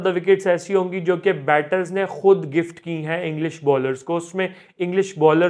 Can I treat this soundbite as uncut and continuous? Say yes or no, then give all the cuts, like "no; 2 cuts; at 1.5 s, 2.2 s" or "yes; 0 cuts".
yes; 0 cuts